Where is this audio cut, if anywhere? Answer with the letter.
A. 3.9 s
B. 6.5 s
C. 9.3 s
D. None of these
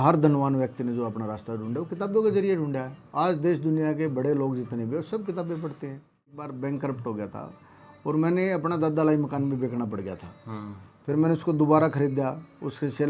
B